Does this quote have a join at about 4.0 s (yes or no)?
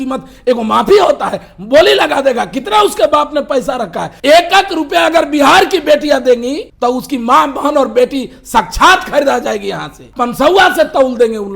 yes